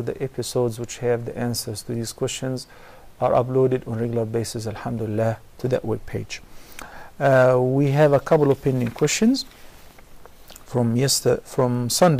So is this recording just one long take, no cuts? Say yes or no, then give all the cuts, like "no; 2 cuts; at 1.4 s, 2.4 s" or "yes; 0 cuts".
no; 1 cut; at 1.0 s